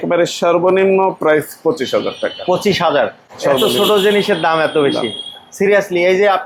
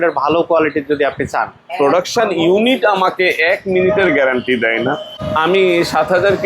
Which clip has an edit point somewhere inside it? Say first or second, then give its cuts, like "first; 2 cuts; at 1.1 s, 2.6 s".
second; 1 cut; at 1.6 s